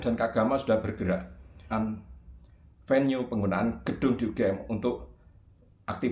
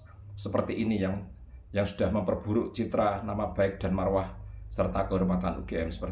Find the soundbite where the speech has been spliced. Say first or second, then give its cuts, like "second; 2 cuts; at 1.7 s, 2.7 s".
first; 1 cut; at 1.6 s